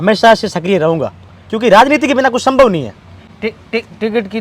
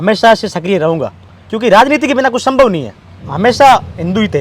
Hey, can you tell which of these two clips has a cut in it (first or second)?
second